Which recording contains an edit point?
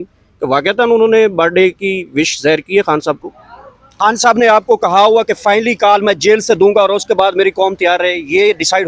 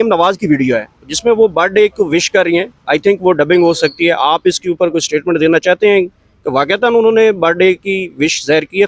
first; 1 cut; at 3.9 s

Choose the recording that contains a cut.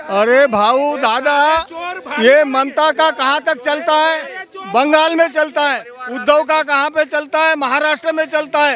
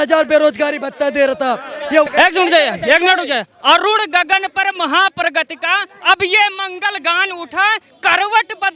second; 1 cut; at 2.1 s

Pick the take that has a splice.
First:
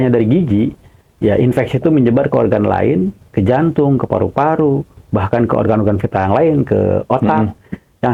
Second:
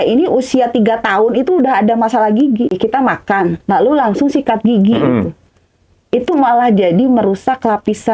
second; 1 cut; at 2.8 s

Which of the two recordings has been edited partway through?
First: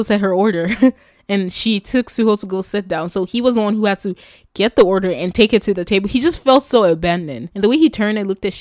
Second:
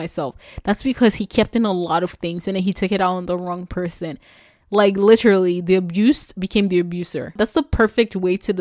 first; 1 cut; at 7.4 s

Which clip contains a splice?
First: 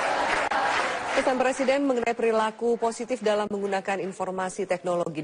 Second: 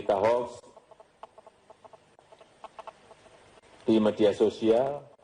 first; 1 cut; at 3.2 s

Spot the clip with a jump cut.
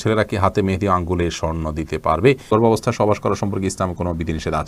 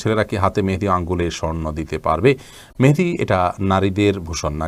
first; 1 cut; at 2.5 s

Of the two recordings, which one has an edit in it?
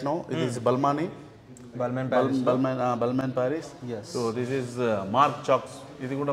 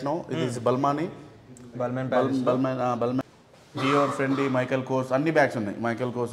second; 1 cut; at 3.3 s

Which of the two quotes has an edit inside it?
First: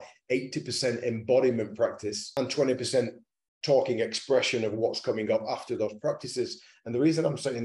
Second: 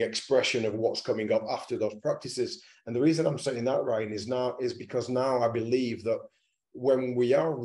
first; 1 cut; at 2.2 s

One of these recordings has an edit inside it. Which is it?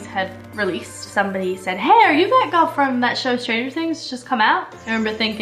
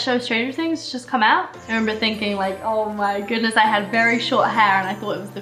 first; 1 cut; at 1.1 s

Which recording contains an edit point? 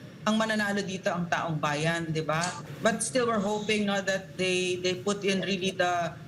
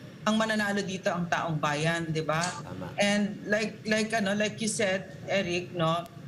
first; 1 cut; at 2.7 s

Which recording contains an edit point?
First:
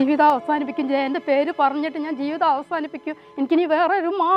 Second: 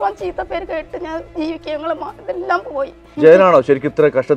second; 1 cut; at 3.0 s

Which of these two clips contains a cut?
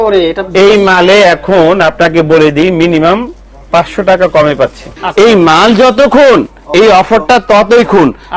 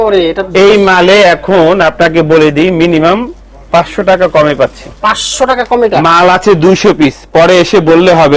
first; 1 cut; at 4.9 s

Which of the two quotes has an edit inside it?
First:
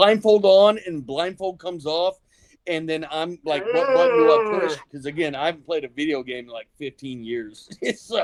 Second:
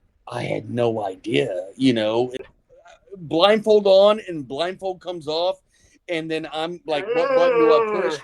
second; 1 cut; at 2.4 s

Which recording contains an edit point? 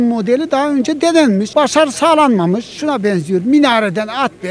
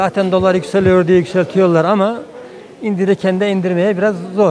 first; 2 cuts; at 1.5 s, 2.7 s

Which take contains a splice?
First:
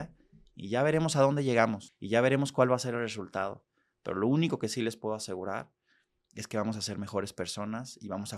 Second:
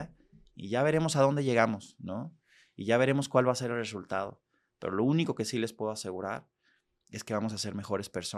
first; 1 cut; at 1.9 s

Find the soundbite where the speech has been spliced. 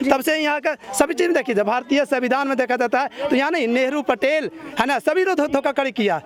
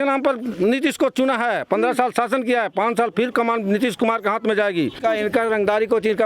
second; 1 cut; at 5.0 s

